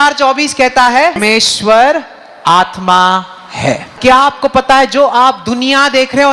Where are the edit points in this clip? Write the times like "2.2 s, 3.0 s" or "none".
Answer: 1.2 s, 4.0 s

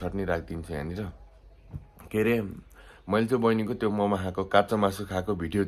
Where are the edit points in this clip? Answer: none

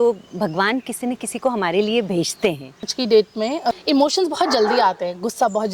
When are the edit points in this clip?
2.9 s, 3.8 s

